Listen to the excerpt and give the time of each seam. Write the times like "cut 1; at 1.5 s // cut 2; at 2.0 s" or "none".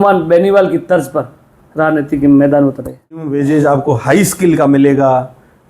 cut 1; at 3.3 s